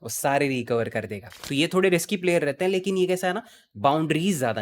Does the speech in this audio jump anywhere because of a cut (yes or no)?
yes